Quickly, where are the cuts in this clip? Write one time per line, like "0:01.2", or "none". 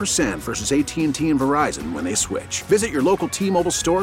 none